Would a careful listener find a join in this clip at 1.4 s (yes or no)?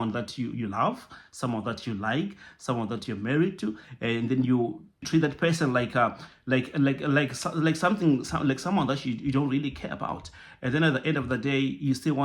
no